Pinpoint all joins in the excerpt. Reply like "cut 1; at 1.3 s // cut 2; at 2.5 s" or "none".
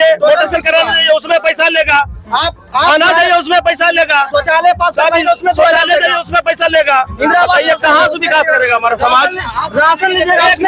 none